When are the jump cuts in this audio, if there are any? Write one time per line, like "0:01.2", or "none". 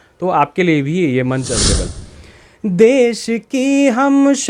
0:02.0